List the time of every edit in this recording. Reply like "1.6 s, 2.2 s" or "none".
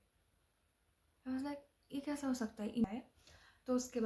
2.9 s